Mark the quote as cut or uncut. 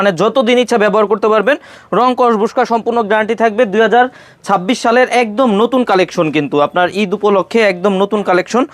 uncut